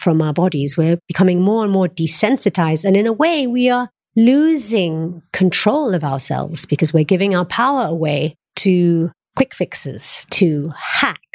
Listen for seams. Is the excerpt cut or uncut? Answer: uncut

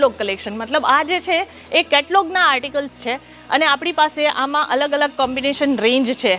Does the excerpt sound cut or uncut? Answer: uncut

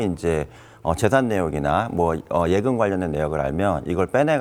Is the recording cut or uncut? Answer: uncut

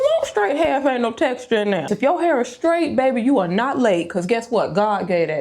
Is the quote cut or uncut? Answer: cut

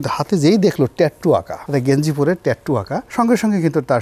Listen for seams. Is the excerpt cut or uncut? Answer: cut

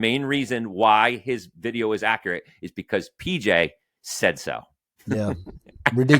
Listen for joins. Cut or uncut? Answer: cut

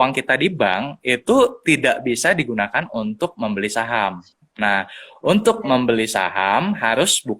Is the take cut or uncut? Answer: uncut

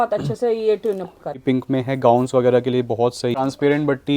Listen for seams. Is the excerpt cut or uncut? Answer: cut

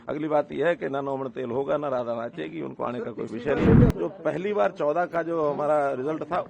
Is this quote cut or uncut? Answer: cut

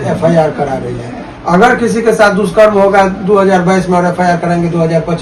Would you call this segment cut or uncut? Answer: uncut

